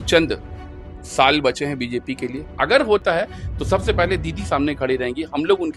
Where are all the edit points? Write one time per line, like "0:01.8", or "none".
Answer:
0:02.5